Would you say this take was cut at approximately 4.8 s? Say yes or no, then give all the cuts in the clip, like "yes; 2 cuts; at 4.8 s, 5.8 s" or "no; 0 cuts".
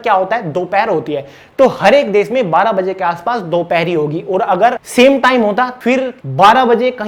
yes; 2 cuts; at 4.8 s, 5.8 s